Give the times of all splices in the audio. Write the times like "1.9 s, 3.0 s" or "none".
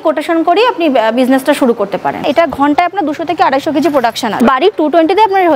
2.2 s, 4.4 s